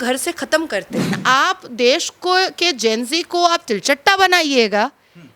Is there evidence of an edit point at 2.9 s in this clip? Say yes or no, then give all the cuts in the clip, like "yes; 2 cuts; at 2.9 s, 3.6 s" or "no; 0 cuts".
no; 1 cut; at 1.2 s